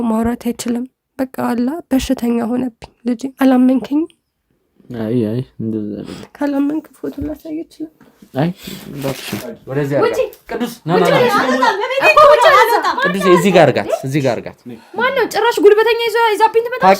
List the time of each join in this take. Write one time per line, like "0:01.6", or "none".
0:03.3
0:09.4